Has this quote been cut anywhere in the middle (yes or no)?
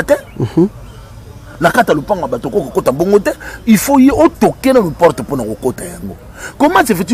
no